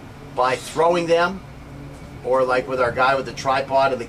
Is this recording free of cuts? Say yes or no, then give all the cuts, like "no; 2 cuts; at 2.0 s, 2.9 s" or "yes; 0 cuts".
no; 1 cut; at 2.4 s